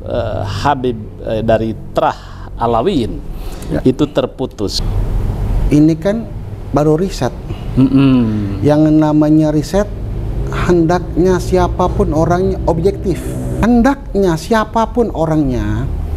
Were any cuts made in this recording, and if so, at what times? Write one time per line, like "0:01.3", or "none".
0:04.8
0:13.4